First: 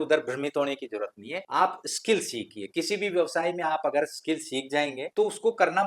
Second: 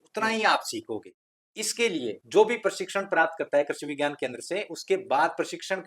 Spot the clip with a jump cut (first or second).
second